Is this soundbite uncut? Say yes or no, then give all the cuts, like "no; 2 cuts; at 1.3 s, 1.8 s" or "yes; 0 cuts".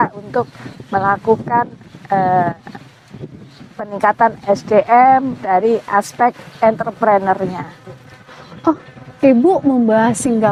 yes; 0 cuts